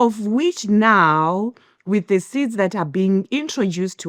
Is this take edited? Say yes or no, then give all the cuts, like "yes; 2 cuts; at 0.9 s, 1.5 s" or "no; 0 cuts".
no; 0 cuts